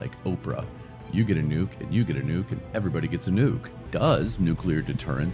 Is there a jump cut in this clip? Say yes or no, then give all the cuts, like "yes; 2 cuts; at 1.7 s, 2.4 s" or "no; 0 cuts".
yes; 1 cut; at 3.7 s